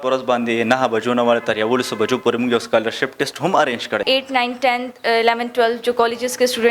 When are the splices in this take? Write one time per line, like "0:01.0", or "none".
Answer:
0:04.0